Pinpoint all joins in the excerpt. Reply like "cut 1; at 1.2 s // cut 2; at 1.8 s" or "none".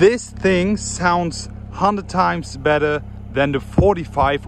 none